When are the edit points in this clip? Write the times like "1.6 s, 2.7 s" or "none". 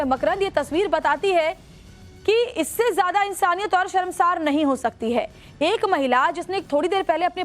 5.4 s